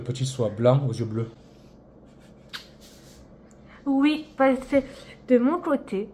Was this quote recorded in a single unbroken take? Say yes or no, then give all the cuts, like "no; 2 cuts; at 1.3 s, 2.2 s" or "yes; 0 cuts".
yes; 0 cuts